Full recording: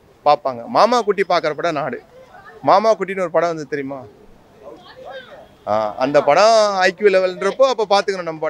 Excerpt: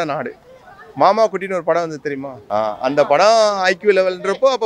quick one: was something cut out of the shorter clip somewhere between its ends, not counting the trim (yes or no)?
yes